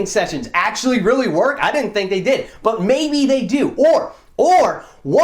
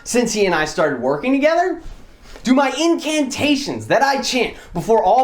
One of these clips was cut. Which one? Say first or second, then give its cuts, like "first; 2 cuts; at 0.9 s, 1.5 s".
second; 1 cut; at 2.3 s